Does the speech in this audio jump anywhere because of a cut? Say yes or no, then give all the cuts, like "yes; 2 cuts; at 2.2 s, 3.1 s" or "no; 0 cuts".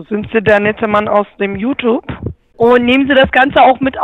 yes; 1 cut; at 2.4 s